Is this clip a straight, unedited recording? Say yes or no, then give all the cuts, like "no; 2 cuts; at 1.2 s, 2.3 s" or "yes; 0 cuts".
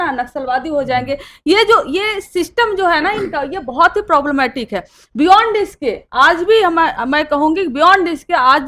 yes; 0 cuts